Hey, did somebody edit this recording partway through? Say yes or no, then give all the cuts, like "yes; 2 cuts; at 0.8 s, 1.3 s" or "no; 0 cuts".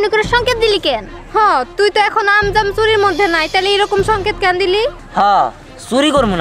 no; 0 cuts